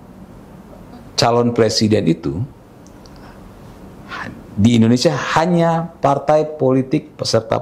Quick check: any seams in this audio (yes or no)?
no